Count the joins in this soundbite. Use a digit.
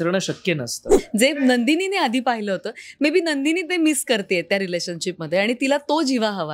1